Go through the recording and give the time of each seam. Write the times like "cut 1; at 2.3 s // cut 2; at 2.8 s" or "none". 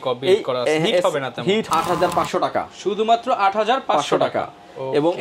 cut 1; at 1.6 s